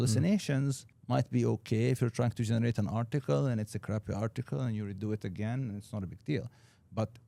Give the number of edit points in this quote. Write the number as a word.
zero